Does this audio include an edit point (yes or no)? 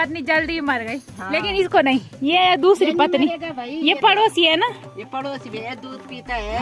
no